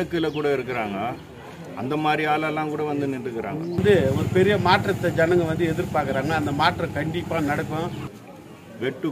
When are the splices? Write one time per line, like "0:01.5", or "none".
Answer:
0:03.8
0:08.3